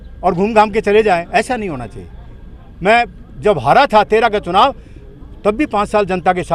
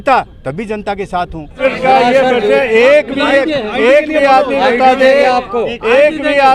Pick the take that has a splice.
second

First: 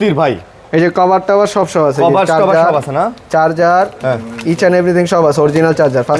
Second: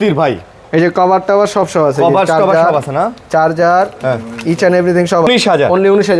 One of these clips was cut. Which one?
second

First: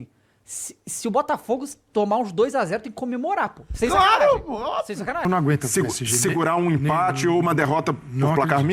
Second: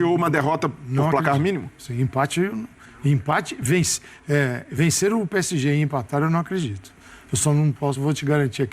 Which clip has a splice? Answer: first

